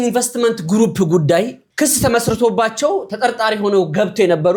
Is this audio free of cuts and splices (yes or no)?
yes